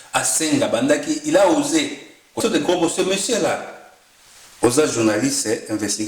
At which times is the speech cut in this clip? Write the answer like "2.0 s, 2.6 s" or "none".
2.4 s